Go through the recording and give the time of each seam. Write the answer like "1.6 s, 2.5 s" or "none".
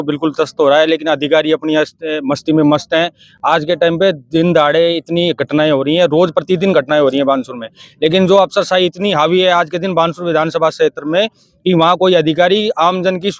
none